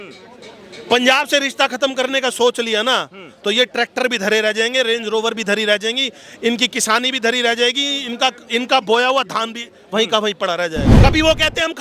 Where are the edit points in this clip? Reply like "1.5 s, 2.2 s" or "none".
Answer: 10.9 s